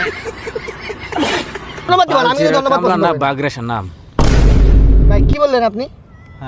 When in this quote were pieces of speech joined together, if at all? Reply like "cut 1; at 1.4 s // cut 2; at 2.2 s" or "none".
cut 1; at 1.9 s